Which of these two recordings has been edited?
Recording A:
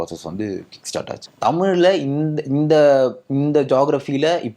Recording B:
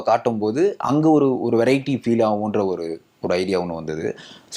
A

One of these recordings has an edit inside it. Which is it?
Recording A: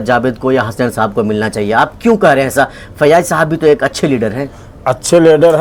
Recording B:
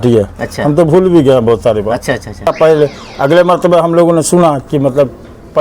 B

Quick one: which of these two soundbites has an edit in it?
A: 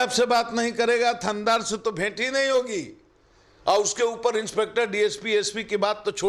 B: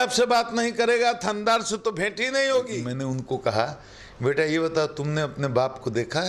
B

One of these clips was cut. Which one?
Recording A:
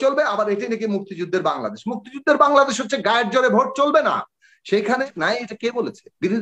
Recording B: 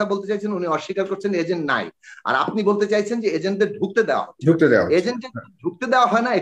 A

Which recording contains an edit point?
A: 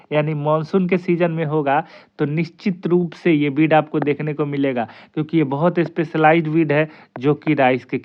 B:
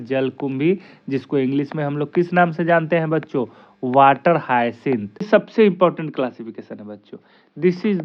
B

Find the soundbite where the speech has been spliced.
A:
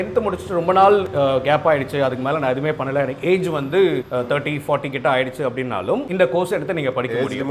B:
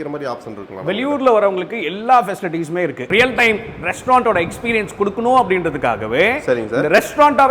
B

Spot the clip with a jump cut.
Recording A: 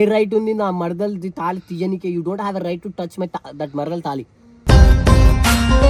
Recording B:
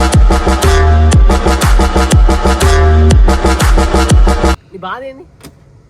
B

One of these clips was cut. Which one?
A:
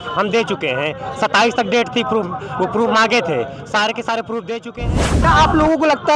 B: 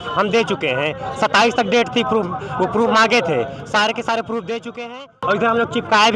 A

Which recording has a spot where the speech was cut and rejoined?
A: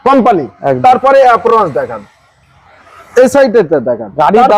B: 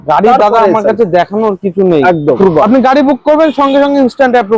B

